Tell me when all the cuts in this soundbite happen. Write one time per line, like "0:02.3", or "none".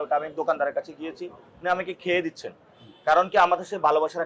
none